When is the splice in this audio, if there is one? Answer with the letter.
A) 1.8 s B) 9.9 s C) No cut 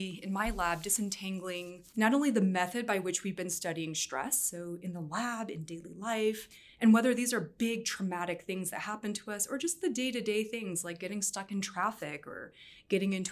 A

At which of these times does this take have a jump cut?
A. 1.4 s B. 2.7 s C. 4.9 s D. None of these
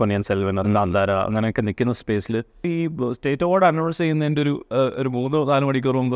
B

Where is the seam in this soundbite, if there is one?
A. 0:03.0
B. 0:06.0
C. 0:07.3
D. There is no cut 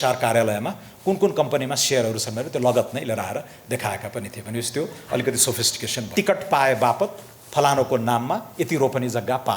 B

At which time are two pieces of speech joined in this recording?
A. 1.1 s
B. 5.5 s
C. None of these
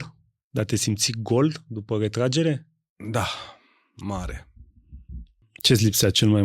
B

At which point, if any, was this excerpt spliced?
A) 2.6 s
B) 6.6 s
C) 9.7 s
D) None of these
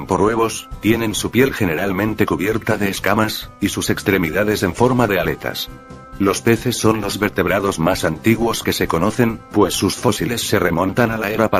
C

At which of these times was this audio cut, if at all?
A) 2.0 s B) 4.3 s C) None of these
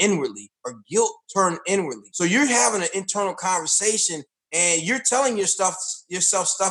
A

